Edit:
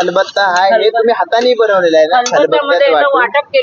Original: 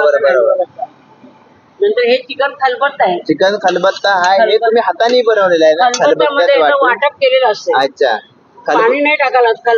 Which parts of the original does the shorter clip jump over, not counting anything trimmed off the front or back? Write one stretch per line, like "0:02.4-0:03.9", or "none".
none